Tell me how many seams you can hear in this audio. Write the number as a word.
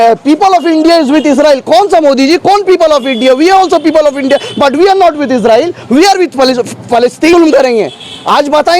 one